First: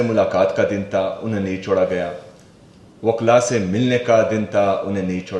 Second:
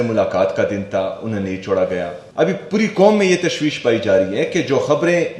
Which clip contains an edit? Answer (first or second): second